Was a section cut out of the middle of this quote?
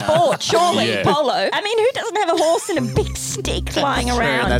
yes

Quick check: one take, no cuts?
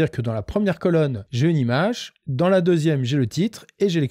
no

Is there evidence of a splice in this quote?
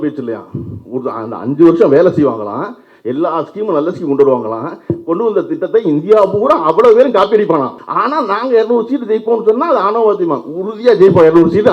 yes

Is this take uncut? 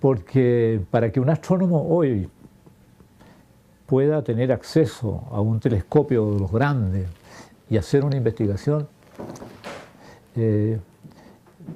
no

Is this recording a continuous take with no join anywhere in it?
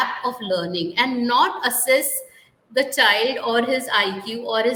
yes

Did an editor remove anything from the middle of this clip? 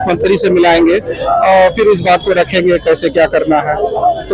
no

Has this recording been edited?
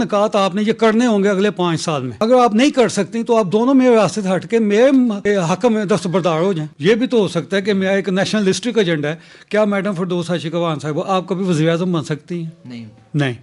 yes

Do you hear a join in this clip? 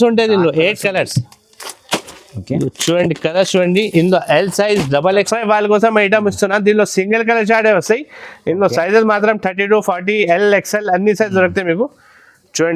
yes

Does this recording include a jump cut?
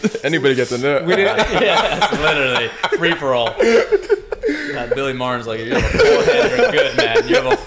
no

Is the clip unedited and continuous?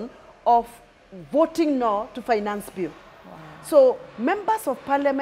yes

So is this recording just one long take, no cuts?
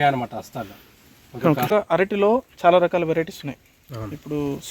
no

